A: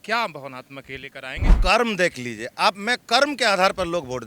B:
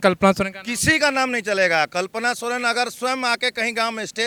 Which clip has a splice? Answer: A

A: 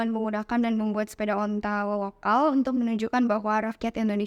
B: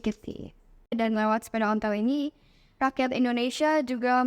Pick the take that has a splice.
B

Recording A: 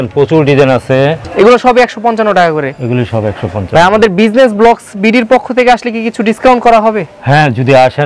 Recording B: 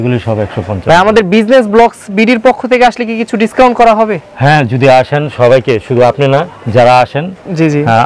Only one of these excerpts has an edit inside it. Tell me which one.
A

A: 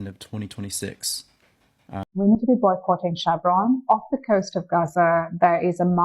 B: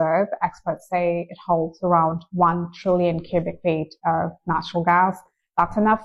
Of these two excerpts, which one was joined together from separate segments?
A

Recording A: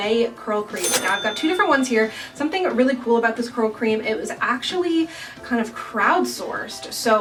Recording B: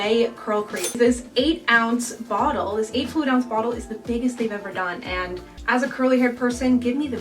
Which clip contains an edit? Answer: B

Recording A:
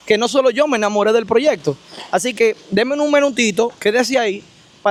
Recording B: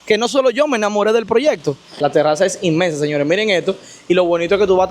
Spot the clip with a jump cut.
B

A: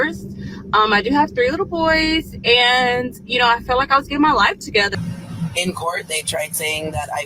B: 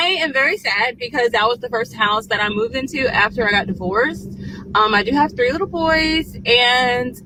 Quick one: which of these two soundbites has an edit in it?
A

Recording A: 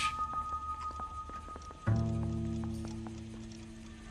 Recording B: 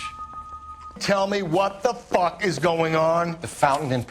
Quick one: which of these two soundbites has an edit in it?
B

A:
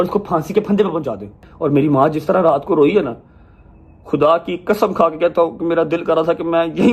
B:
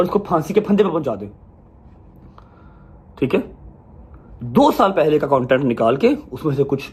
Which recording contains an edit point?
A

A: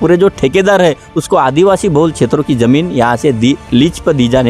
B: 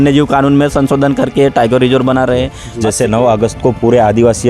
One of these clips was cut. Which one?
B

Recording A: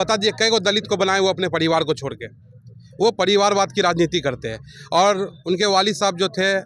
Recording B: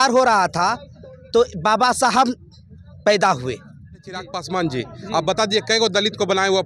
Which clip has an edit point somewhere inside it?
B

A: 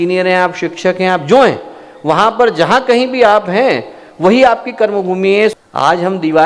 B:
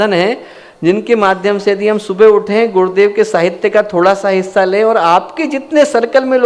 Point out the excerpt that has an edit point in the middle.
A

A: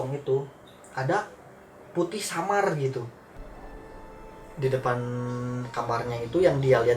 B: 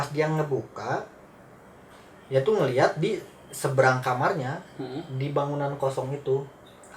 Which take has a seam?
A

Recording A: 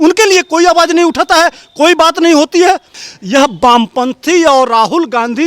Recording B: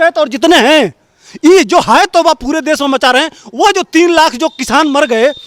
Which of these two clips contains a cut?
A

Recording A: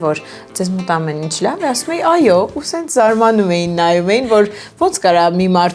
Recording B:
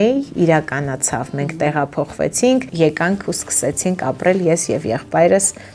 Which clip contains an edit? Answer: B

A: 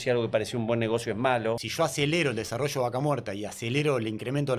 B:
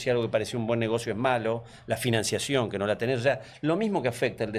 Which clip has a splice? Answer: A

